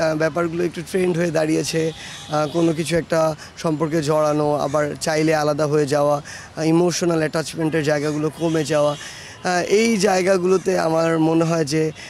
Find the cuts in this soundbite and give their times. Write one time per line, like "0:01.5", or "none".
none